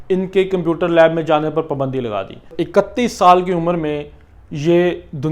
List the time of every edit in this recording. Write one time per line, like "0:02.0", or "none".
0:02.5